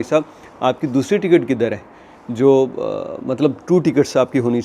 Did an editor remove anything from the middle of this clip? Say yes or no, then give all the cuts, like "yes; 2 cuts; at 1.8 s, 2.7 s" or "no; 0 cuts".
no; 0 cuts